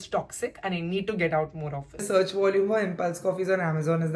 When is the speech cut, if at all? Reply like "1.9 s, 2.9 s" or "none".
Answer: 2.0 s